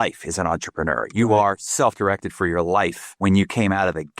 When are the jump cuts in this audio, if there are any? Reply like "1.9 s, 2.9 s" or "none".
3.2 s